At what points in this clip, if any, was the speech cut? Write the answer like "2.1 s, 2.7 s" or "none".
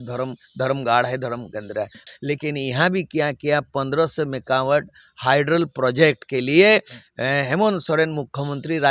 2.1 s